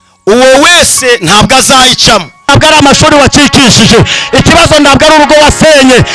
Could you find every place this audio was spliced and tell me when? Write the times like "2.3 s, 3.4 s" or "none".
2.5 s